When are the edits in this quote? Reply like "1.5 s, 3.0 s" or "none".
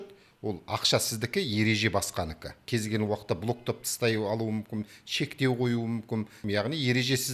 2.6 s, 6.4 s